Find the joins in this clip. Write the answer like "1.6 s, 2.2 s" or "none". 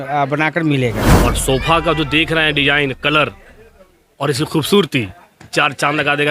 1.1 s